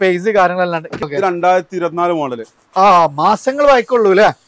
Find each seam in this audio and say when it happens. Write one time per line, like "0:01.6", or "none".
0:01.0